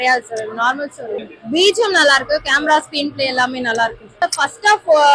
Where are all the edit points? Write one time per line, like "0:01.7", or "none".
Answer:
0:01.3
0:04.2